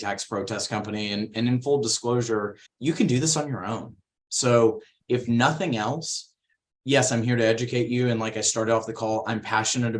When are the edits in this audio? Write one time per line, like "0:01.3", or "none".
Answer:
0:02.6